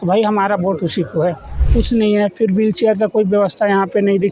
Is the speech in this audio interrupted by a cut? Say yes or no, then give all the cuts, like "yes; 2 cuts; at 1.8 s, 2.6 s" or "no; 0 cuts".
yes; 1 cut; at 1.5 s